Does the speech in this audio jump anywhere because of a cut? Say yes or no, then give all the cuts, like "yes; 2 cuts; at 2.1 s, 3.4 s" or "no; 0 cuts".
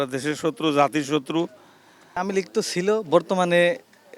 yes; 1 cut; at 2.2 s